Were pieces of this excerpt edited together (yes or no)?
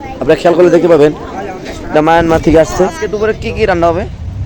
yes